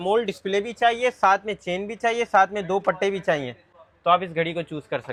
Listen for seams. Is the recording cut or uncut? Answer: uncut